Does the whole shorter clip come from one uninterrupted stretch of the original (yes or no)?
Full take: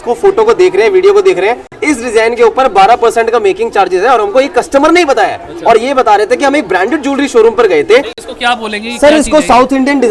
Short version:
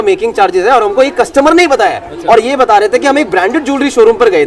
yes